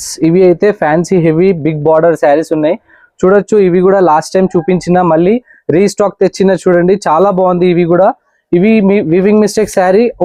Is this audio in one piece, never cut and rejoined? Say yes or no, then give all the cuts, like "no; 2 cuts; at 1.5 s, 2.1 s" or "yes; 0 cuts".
yes; 0 cuts